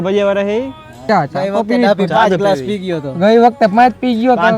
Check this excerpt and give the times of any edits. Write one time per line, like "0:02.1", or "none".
0:01.0